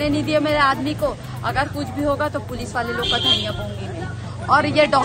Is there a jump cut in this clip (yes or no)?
no